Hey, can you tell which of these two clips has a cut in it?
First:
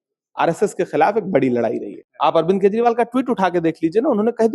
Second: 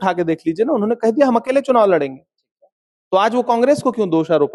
first; 1 cut; at 2.0 s

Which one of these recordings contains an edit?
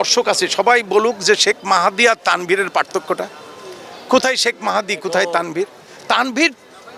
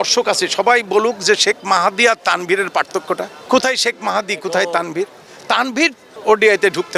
second; 2 cuts; at 3.3 s, 6.1 s

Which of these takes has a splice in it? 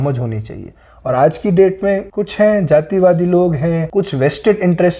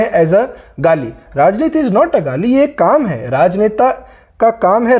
first; 2 cuts; at 2.2 s, 3.9 s

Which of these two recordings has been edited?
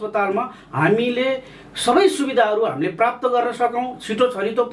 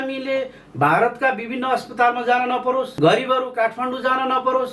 second; 1 cut; at 2.9 s

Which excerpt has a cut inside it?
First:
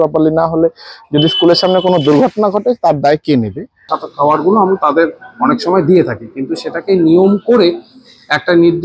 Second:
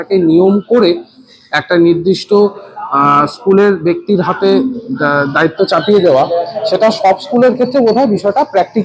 first; 1 cut; at 4.0 s

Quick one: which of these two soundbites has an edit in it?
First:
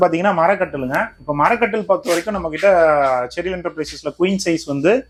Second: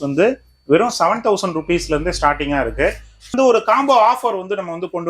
second; 1 cut; at 3.3 s

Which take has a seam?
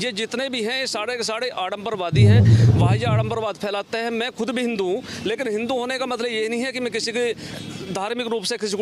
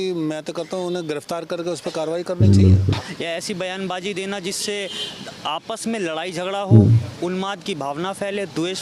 second; 1 cut; at 3.0 s

